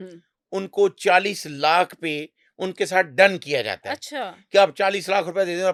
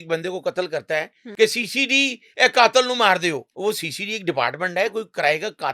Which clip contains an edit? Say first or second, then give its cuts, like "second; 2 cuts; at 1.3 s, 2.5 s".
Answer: second; 2 cuts; at 1.2 s, 3.5 s